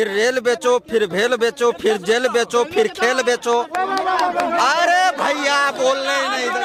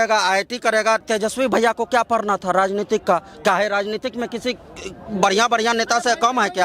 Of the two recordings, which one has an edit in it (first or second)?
second